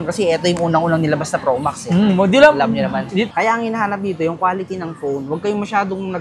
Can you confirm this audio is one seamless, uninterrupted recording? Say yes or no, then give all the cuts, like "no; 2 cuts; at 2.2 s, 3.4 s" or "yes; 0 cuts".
no; 1 cut; at 3.3 s